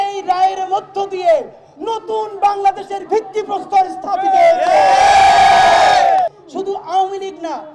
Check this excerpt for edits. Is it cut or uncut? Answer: cut